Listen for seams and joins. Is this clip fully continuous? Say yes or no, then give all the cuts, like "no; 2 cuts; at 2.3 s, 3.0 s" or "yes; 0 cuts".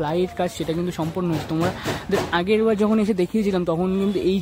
yes; 0 cuts